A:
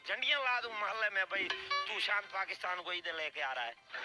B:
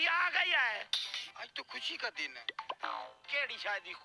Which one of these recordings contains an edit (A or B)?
B